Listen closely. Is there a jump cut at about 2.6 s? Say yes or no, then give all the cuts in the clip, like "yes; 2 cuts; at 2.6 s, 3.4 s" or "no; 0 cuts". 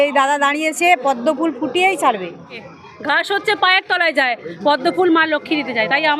yes; 1 cut; at 2.6 s